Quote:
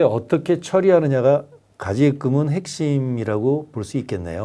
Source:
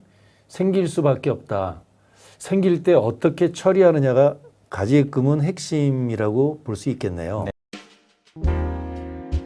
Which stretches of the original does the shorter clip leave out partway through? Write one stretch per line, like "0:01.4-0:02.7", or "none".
none